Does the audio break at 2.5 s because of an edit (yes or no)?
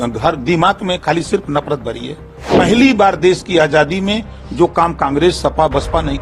yes